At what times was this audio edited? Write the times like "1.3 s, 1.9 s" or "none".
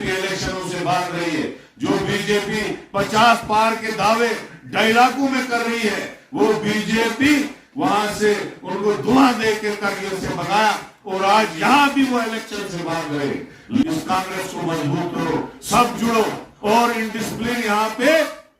13.8 s